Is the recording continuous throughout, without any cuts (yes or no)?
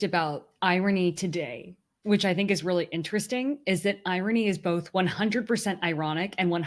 yes